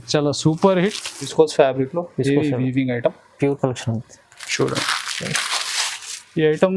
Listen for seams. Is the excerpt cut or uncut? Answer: cut